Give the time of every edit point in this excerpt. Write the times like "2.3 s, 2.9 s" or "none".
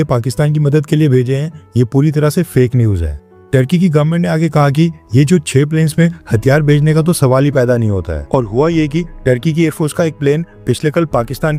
none